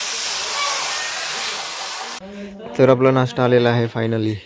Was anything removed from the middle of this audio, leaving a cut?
yes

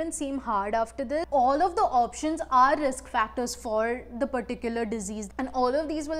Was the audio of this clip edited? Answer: yes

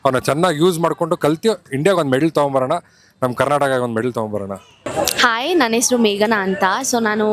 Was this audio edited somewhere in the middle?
no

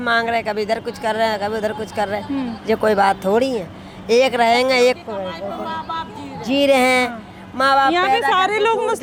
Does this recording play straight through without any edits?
yes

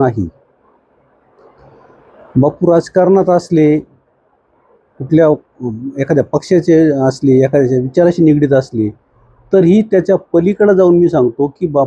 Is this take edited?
no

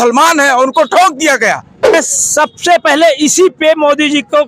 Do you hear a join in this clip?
yes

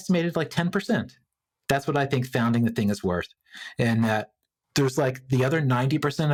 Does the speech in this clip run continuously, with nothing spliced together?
yes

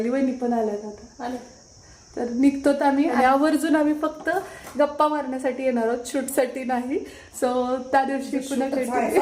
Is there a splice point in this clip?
yes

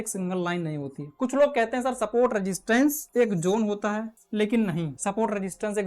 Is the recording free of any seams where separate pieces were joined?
no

